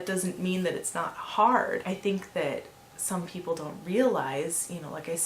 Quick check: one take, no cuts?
no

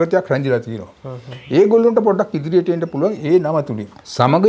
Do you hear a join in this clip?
no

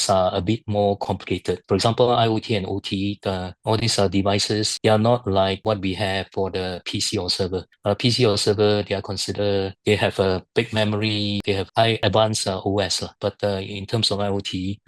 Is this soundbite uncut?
yes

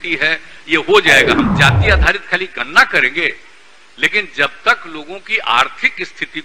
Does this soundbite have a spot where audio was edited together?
yes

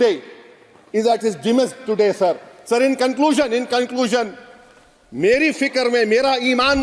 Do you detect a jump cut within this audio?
no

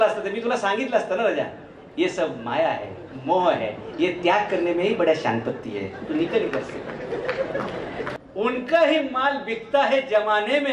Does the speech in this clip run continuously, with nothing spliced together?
no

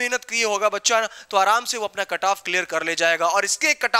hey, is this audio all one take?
yes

